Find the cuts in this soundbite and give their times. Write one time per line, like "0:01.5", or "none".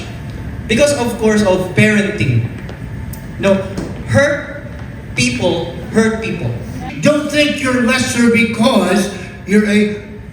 0:06.9